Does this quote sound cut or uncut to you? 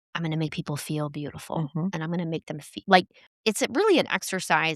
cut